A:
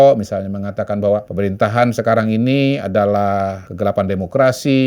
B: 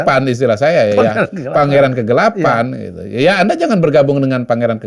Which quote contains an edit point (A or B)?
A